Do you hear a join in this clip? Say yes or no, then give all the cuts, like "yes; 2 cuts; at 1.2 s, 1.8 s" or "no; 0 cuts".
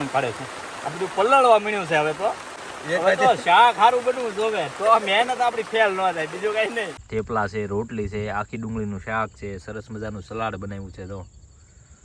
yes; 2 cuts; at 2.7 s, 7.0 s